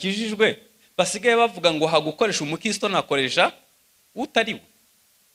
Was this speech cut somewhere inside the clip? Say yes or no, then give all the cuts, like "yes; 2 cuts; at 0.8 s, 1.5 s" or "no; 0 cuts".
no; 0 cuts